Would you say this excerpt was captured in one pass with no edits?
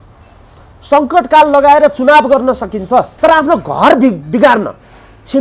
no; 1 cut; at 3.1 s

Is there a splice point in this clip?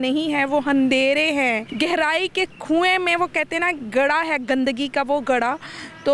yes; 1 cut; at 1.7 s

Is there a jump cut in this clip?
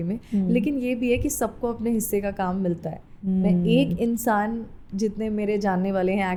no; 0 cuts

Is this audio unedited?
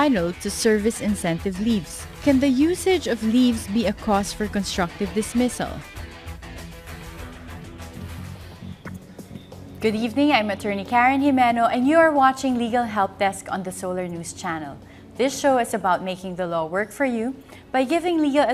yes; 0 cuts

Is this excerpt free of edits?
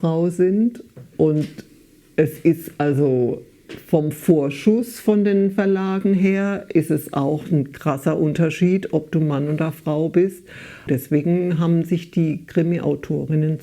no; 1 cut; at 10.9 s

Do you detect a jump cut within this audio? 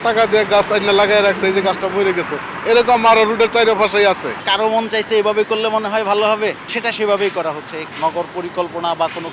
yes; 3 cuts; at 4.4 s, 6.7 s, 7.8 s

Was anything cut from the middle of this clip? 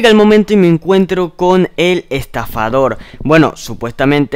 no; 0 cuts

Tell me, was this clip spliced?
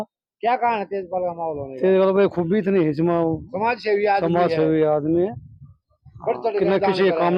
no; 0 cuts

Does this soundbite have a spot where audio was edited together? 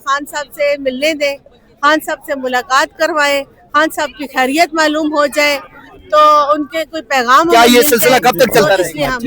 yes; 1 cut; at 7.5 s

